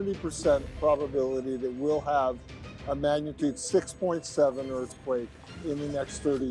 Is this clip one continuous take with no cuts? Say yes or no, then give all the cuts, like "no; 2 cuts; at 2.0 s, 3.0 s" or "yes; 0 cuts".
yes; 0 cuts